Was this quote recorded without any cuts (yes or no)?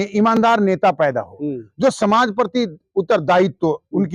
yes